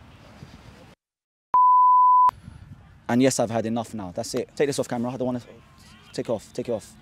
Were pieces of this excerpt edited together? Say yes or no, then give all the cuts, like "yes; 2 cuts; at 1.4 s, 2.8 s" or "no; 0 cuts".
yes; 2 cuts; at 2.5 s, 4.5 s